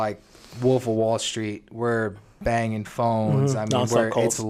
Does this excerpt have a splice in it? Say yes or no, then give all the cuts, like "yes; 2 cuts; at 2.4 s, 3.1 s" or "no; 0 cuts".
no; 0 cuts